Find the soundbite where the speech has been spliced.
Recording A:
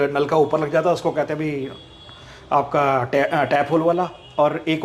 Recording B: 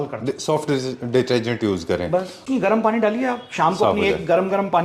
B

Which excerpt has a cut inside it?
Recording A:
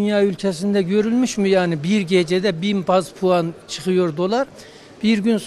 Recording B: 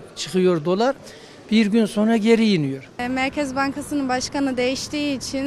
B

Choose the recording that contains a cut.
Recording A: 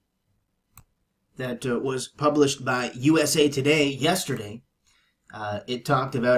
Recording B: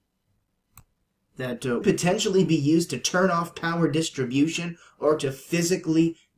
A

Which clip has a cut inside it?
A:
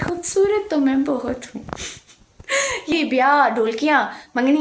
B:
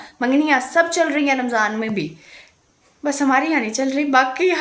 A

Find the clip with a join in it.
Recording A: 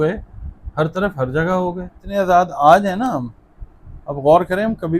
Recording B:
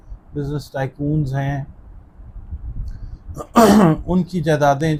A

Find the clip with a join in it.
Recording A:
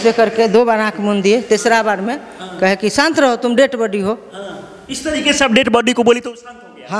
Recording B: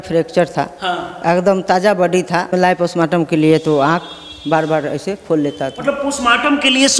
B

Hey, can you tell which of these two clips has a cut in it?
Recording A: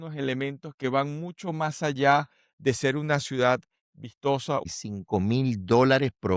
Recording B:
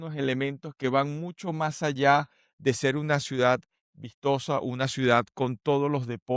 A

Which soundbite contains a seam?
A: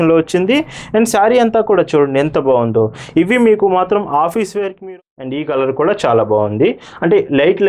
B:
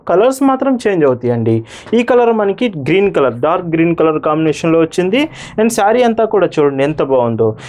A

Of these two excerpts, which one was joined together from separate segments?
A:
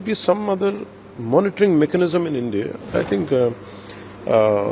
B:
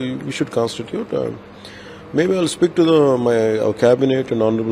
A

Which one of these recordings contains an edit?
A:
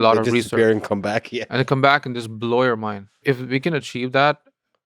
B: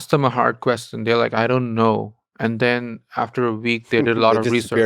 A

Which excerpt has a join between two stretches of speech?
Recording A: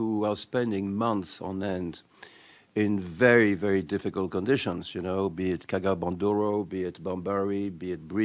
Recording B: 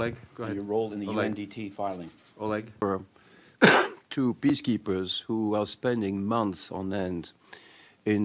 B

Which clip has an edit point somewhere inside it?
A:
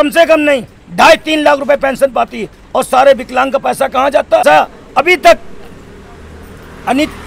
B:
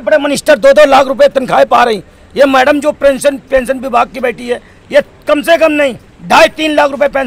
A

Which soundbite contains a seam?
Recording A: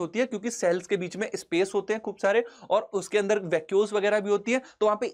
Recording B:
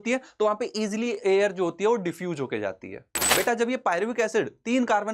B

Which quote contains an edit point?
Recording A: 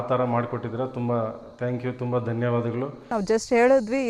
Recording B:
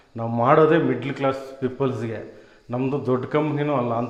A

